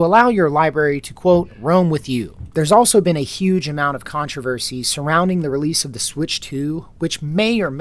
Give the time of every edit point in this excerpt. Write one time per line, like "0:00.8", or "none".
0:02.4